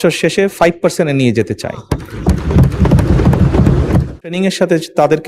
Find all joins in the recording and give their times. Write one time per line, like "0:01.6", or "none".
0:04.2